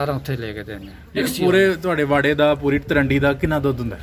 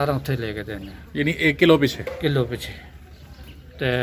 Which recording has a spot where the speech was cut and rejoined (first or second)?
first